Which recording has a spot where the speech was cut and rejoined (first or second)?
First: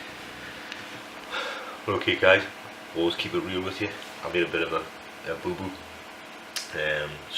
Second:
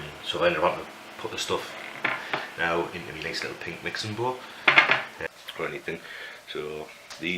second